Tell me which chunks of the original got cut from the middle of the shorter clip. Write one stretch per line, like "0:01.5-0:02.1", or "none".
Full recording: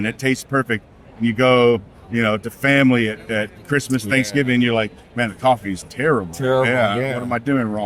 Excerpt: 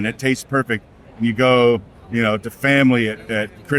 none